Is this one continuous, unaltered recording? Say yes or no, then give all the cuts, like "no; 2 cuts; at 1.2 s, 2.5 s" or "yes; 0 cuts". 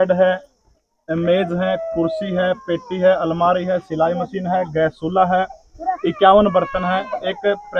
yes; 0 cuts